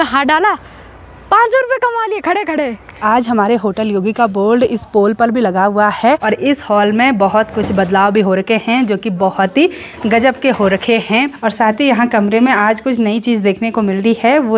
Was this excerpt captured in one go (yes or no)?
no